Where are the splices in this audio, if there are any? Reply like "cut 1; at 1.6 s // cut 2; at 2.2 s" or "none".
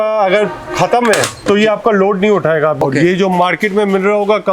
cut 1; at 2.8 s